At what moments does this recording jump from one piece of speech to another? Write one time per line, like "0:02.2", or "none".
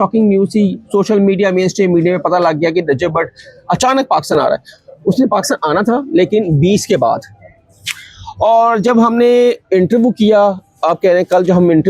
none